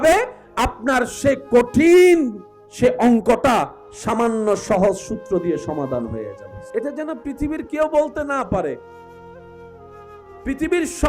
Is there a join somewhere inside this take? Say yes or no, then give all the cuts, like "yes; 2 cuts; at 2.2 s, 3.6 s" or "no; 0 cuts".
yes; 1 cut; at 6.4 s